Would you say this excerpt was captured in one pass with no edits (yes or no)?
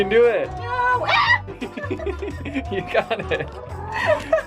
yes